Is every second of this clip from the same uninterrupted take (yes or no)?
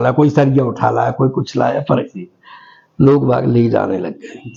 yes